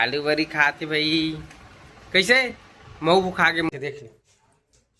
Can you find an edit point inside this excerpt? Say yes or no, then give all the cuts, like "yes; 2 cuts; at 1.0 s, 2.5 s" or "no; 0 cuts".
yes; 1 cut; at 3.7 s